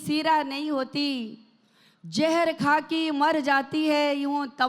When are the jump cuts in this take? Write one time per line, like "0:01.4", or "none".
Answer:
none